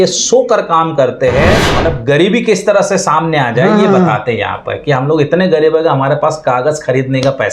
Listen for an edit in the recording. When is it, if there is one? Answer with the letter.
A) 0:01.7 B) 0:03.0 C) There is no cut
A